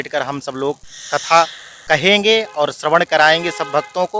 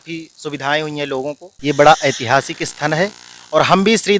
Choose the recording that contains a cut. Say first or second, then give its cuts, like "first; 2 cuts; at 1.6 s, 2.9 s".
second; 1 cut; at 1.5 s